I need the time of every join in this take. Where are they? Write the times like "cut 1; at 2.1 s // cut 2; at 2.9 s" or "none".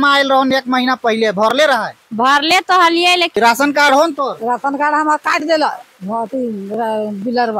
cut 1; at 3.4 s